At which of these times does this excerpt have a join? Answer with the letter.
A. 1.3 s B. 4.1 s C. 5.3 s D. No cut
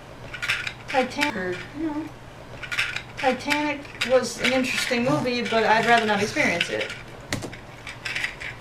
D